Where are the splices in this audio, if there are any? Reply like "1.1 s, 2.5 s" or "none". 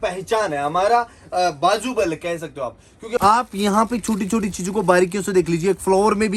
3.2 s

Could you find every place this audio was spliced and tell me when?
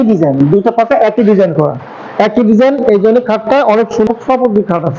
4.1 s

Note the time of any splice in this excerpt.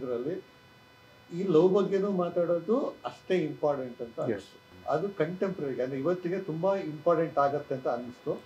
4.7 s

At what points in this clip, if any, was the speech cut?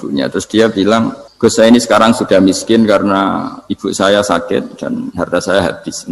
1.2 s

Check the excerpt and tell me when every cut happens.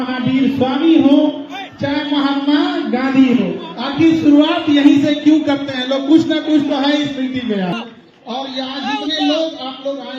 7.7 s

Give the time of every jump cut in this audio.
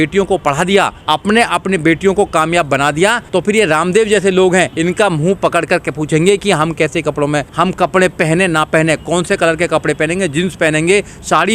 1.0 s, 3.2 s, 4.7 s, 7.5 s

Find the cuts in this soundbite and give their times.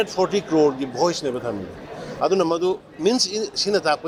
none

